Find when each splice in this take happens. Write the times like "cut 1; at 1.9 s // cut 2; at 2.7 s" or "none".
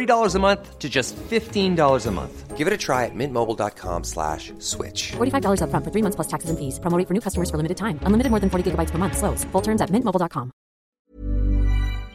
cut 1; at 10.9 s